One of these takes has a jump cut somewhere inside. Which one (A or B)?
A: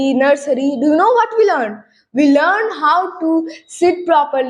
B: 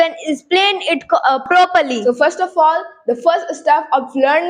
B